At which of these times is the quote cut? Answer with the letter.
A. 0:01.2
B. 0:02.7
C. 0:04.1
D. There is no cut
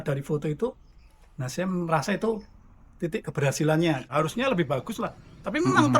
C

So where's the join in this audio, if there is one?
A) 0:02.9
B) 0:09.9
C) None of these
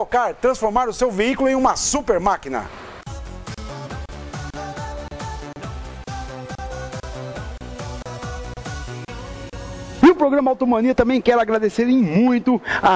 B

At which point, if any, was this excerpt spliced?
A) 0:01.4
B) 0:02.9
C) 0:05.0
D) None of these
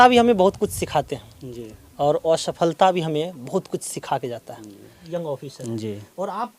C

